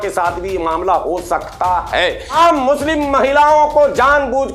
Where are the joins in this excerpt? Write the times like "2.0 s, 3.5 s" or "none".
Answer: 2.3 s